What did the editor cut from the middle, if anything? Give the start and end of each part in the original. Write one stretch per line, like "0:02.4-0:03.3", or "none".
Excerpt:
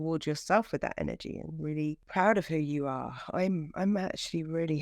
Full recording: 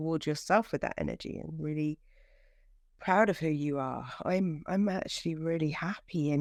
0:02.0-0:02.9